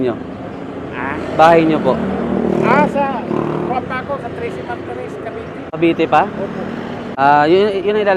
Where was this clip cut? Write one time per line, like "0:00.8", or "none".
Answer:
0:05.7
0:07.0